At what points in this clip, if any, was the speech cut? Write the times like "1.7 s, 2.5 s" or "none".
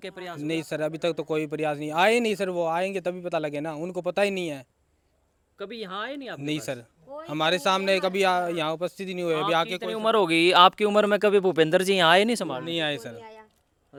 none